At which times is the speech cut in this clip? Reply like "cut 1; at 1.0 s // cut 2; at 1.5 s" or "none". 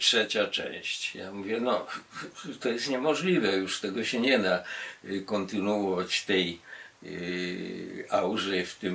none